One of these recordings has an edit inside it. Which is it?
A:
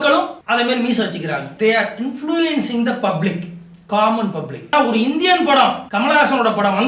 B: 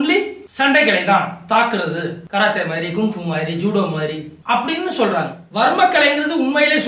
A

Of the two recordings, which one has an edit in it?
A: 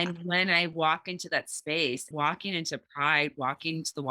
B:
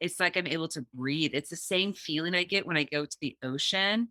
A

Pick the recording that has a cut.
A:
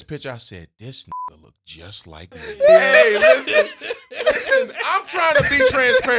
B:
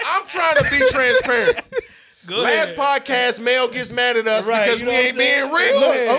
A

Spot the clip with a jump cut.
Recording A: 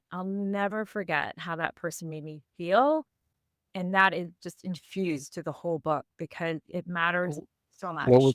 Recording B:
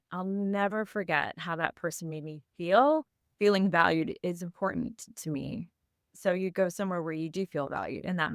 B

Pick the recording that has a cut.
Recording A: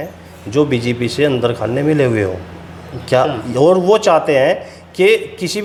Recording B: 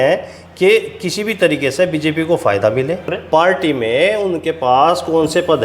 B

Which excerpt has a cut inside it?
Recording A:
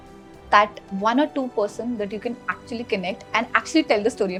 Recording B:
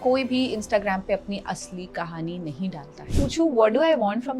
B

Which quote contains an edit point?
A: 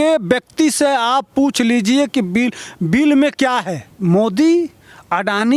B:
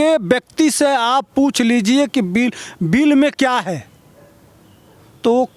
A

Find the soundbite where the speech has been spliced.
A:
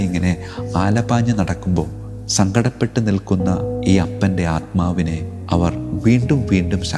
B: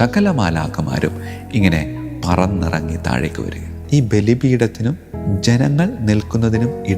B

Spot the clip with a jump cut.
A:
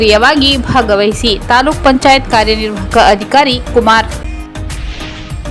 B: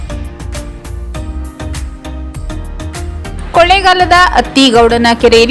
A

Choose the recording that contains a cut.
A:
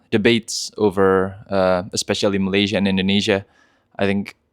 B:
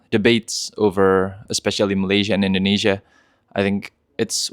B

